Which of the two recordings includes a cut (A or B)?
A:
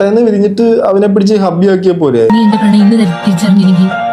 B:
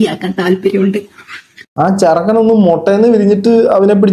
A